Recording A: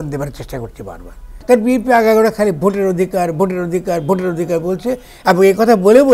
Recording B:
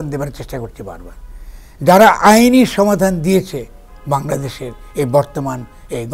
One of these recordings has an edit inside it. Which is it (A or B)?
A